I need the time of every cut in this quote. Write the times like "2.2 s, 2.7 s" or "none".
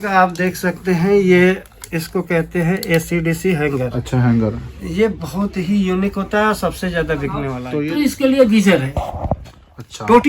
7.6 s